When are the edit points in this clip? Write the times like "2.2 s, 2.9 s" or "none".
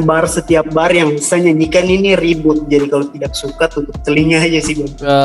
none